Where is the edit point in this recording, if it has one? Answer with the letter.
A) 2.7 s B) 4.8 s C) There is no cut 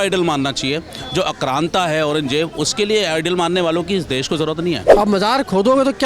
B